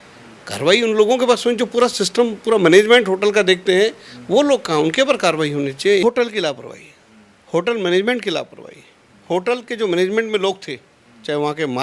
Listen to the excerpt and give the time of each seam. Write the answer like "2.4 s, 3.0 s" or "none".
6.0 s